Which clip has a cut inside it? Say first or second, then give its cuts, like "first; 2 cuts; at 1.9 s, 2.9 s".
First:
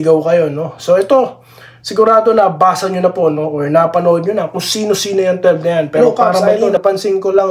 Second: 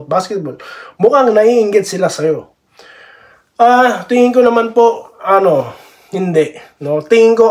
first; 1 cut; at 6.4 s